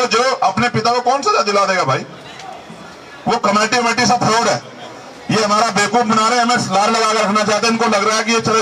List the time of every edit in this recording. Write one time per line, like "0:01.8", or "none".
none